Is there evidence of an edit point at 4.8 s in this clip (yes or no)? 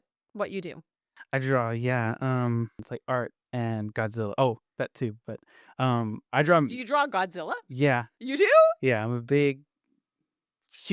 no